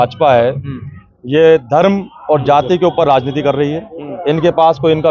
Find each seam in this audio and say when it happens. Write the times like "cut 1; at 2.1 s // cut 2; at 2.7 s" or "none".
none